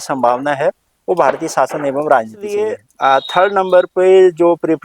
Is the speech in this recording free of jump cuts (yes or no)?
no